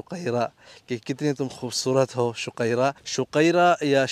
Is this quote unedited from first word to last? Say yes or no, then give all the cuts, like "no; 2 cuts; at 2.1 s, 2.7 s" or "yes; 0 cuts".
yes; 0 cuts